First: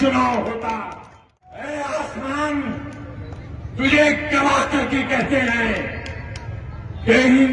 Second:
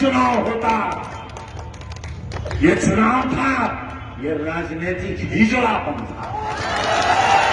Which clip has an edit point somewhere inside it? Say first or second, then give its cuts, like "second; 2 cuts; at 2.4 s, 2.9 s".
first; 1 cut; at 1.5 s